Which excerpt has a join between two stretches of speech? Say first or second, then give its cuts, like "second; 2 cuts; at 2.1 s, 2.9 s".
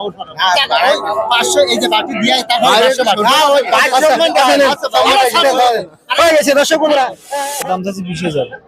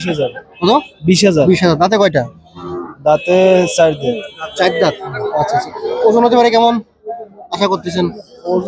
first; 1 cut; at 7.2 s